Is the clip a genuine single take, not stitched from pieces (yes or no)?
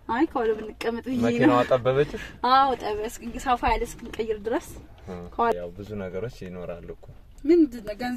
no